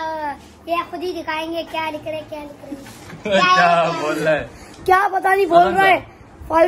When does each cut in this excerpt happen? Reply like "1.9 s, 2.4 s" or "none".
3.2 s